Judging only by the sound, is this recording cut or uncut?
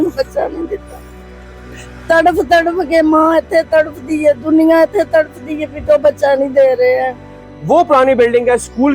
cut